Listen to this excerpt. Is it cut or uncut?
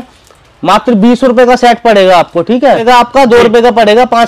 cut